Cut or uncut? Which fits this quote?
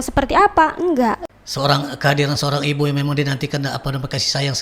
cut